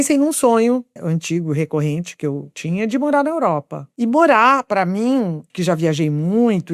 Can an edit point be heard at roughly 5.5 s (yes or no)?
yes